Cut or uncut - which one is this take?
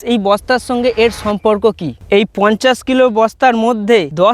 cut